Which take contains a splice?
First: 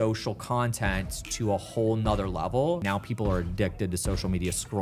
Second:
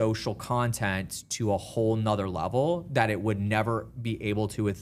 first; 1 cut; at 2.8 s

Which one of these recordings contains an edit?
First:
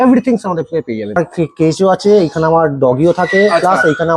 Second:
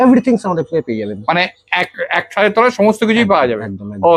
first; 1 cut; at 1.2 s

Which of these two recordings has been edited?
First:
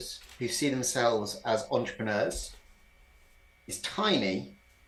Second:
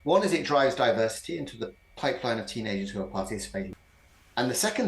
second; 1 cut; at 3.7 s

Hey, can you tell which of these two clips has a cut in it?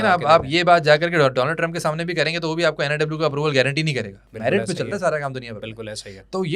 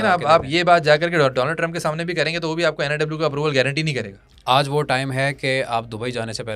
second; 1 cut; at 4.2 s

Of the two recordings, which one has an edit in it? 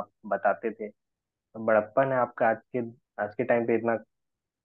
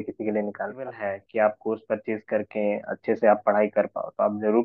second; 1 cut; at 1.0 s

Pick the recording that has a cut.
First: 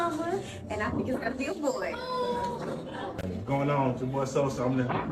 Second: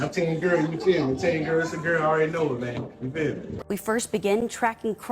second; 1 cut; at 3.5 s

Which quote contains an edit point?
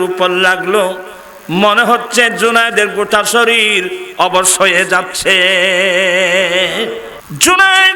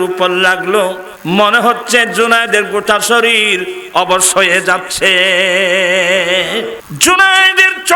second; 2 cuts; at 1.1 s, 6.8 s

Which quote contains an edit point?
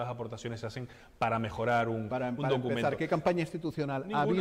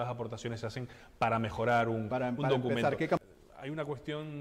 second; 1 cut; at 3.2 s

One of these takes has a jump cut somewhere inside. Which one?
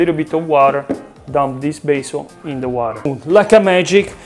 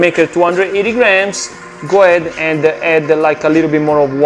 first; 1 cut; at 3.1 s

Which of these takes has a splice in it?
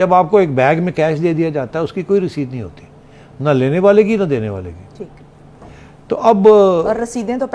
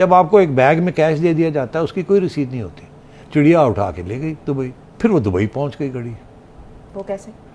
second; 2 cuts; at 3.2 s, 4.8 s

